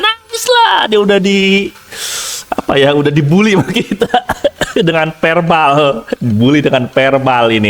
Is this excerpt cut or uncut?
uncut